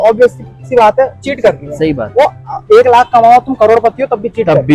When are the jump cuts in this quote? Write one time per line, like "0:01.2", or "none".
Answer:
none